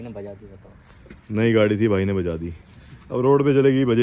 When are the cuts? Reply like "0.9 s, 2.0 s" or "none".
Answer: none